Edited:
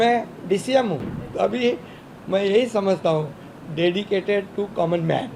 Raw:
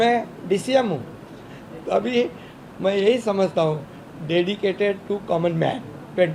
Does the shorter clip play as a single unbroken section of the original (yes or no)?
no